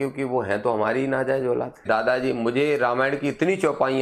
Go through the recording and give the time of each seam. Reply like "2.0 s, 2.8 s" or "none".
1.8 s